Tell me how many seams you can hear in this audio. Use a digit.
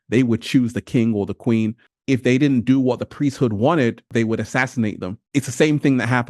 3